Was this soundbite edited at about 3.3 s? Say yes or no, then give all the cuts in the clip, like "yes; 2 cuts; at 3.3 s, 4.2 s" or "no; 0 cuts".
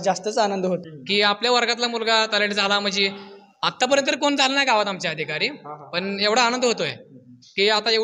no; 1 cut; at 0.9 s